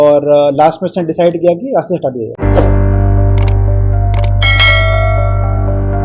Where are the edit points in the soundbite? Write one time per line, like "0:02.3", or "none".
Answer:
none